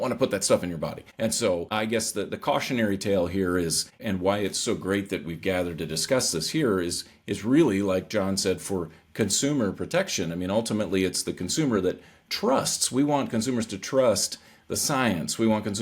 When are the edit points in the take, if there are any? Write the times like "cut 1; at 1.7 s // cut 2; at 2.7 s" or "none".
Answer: cut 1; at 1.0 s // cut 2; at 1.7 s // cut 3; at 4.0 s